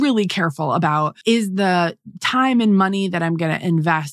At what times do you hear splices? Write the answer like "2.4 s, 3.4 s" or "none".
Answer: 1.1 s